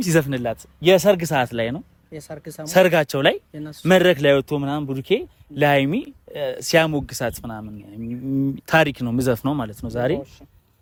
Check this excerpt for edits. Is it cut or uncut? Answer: uncut